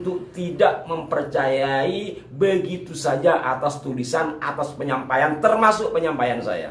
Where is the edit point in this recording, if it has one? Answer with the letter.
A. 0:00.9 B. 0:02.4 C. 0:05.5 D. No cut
D